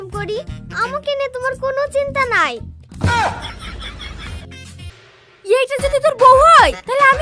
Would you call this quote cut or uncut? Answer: cut